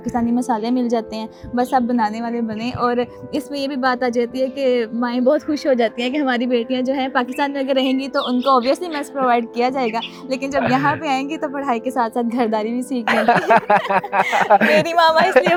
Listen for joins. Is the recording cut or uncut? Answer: uncut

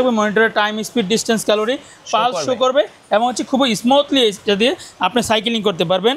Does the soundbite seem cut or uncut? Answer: uncut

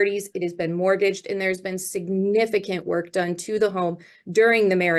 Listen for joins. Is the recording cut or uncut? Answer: uncut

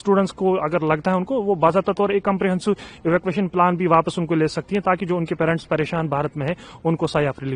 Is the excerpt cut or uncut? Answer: uncut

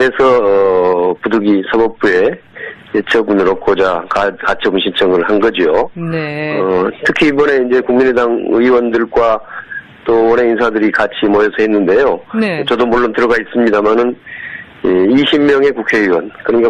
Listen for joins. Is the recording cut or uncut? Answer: cut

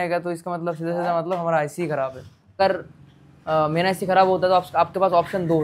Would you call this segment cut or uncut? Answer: cut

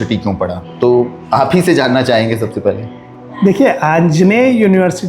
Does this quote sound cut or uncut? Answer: uncut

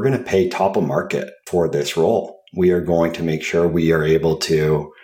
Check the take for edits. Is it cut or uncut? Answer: cut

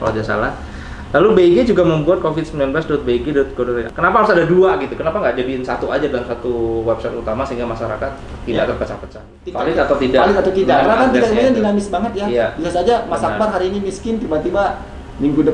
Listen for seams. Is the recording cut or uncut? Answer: cut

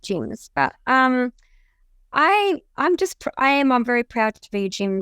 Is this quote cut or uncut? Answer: uncut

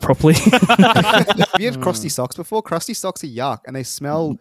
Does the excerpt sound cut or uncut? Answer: cut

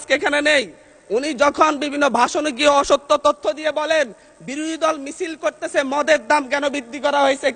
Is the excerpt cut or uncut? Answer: uncut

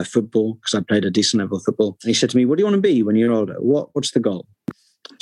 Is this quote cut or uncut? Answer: cut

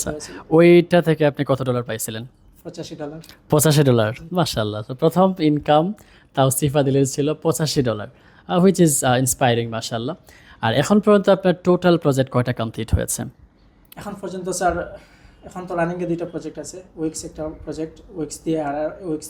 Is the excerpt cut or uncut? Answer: uncut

